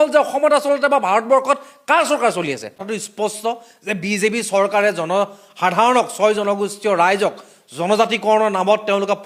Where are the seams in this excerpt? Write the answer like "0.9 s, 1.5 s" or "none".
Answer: 2.9 s